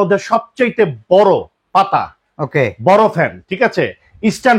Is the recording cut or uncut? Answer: uncut